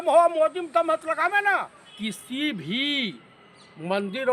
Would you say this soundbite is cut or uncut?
cut